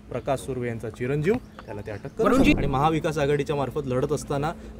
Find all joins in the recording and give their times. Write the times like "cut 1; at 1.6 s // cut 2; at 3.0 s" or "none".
cut 1; at 2.5 s